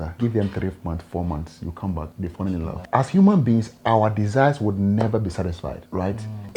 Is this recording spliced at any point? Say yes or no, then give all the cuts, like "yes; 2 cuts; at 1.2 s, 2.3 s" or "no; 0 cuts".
yes; 1 cut; at 2.8 s